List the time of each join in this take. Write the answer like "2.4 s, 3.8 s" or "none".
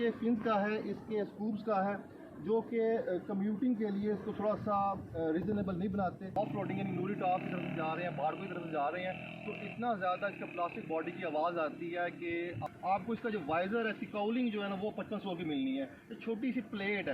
6.3 s, 12.6 s